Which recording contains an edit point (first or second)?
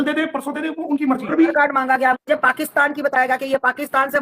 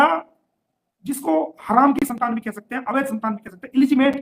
first